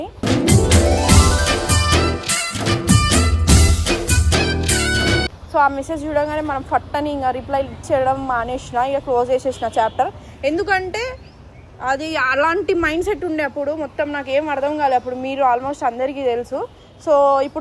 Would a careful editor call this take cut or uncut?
uncut